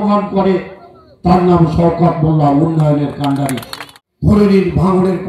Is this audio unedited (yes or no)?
no